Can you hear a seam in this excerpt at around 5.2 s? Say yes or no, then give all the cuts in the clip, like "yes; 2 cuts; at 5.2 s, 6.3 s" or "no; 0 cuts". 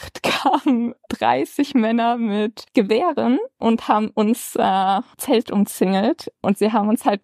yes; 3 cuts; at 3.6 s, 5.2 s, 6.4 s